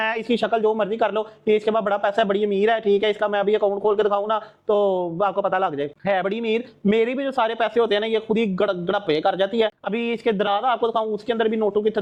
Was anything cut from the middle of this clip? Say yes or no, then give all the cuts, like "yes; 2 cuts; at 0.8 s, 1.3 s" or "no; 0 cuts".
no; 0 cuts